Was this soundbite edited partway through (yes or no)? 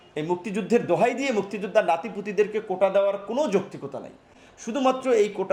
no